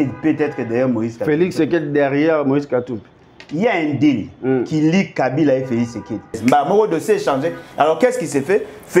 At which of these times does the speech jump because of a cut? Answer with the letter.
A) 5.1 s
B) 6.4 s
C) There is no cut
B